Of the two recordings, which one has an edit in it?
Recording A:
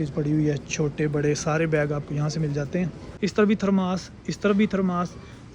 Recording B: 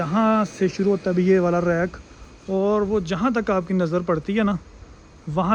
A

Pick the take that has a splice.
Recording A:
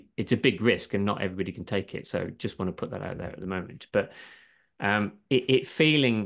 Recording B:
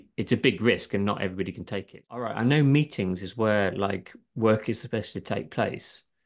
B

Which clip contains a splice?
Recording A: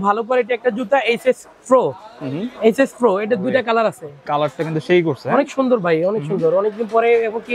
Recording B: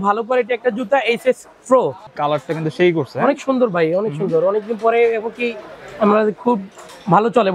B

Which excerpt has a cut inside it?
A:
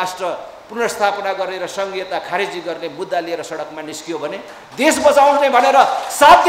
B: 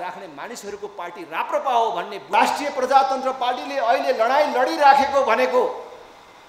B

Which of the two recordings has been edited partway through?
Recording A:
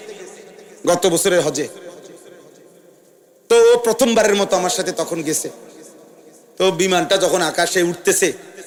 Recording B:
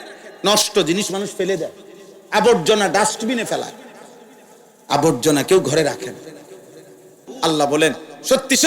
B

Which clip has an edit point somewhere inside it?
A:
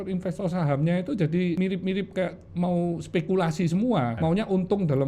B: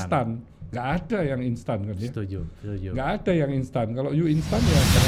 A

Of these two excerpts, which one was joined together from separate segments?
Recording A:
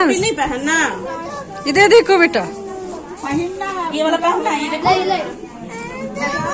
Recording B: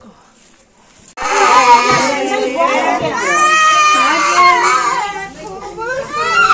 B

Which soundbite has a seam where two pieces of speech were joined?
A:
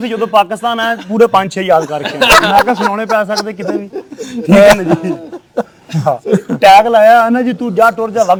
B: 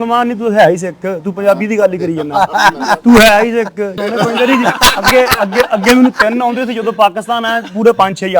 B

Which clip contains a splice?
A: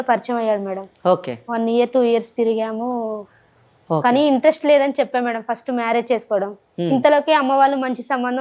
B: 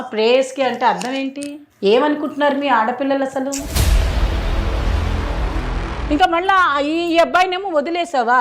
B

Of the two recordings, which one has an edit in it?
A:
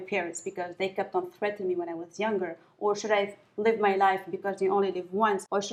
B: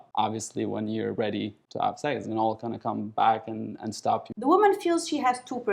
B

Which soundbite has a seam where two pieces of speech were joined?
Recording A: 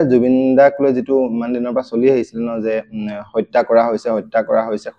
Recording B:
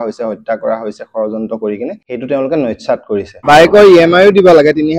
B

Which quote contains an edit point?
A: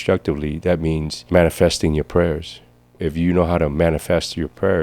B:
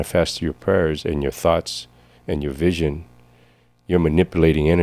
A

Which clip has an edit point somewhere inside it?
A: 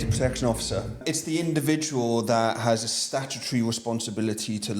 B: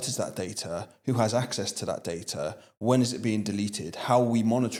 A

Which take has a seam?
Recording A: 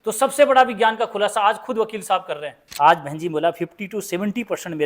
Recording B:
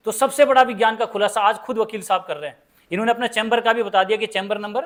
A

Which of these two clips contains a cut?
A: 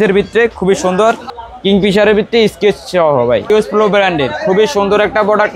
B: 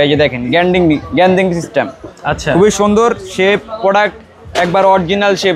A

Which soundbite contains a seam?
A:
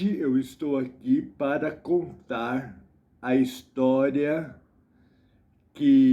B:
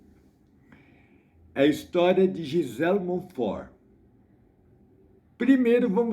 B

